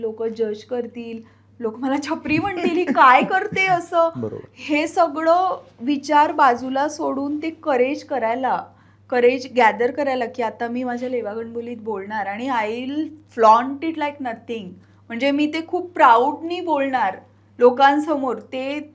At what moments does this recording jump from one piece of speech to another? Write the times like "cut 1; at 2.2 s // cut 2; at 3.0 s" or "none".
none